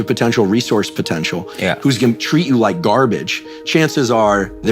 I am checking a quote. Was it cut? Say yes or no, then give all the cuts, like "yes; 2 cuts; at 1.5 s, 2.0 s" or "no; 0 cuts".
no; 0 cuts